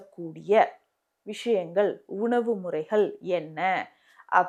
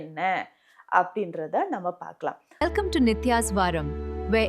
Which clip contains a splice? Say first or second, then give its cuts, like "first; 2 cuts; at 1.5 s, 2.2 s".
second; 1 cut; at 2.5 s